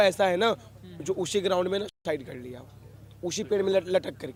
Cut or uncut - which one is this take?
uncut